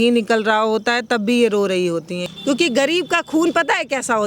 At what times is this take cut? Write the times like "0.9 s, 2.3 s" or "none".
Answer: 2.2 s